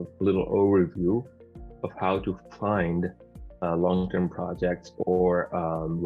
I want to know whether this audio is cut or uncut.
uncut